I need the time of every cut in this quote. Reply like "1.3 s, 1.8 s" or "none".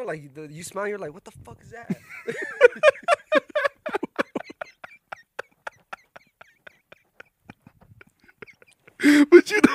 none

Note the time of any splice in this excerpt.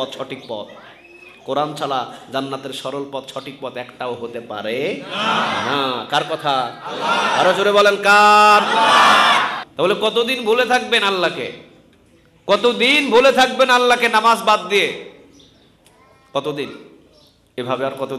9.6 s

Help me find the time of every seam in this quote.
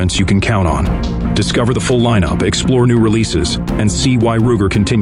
none

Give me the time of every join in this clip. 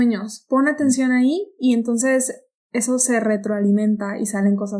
none

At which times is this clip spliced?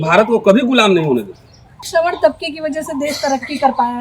1.9 s

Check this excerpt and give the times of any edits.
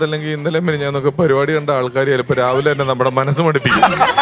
none

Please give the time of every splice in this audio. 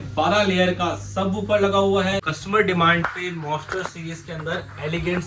2.3 s

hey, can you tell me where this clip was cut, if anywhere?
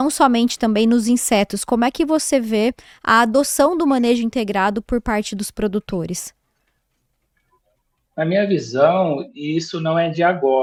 none

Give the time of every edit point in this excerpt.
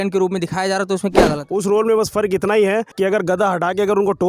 1.4 s, 2.9 s

